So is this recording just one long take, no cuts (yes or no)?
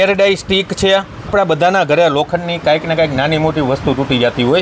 no